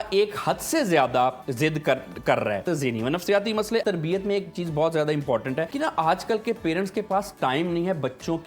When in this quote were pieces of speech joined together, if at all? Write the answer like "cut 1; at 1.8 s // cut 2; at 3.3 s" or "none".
cut 1; at 2.6 s // cut 2; at 3.8 s // cut 3; at 5.7 s